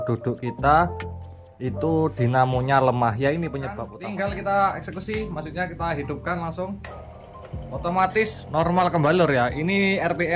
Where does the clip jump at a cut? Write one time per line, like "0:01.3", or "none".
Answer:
0:03.9